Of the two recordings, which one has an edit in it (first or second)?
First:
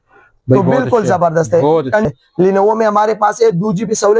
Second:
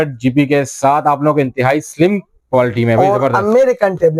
first